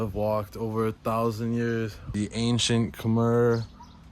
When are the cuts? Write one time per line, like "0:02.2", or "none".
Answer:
0:02.0